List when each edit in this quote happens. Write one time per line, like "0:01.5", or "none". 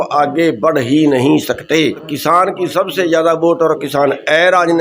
0:02.1